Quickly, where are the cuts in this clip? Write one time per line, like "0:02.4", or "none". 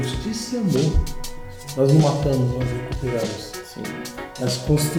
none